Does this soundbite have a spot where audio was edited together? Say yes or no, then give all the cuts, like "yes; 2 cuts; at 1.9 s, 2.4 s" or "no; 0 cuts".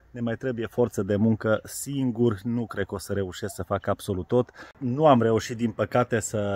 yes; 1 cut; at 4.6 s